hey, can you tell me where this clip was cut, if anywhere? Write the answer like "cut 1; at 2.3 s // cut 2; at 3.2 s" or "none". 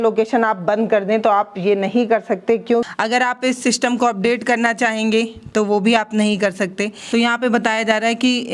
cut 1; at 2.9 s // cut 2; at 7.1 s